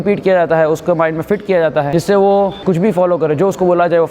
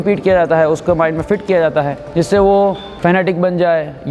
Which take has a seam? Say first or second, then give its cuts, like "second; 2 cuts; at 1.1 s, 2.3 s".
first; 2 cuts; at 1.9 s, 2.6 s